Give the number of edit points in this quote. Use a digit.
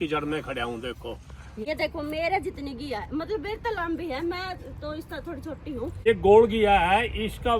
2